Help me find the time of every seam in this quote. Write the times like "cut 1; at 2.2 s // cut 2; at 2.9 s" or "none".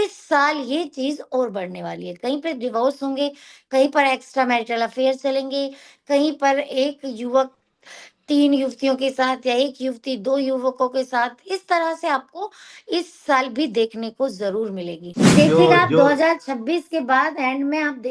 cut 1; at 15.4 s